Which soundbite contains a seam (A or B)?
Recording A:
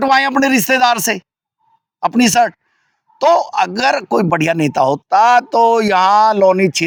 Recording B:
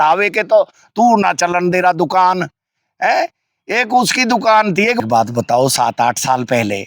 B